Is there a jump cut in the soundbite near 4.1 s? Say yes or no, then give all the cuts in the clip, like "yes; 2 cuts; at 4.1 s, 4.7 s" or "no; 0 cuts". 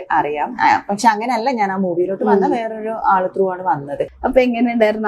yes; 1 cut; at 4.1 s